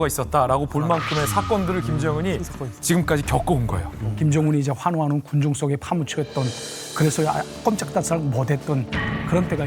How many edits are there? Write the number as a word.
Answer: one